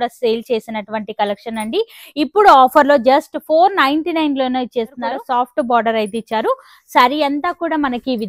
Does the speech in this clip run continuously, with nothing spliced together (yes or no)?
no